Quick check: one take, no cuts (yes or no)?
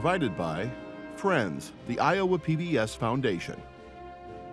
no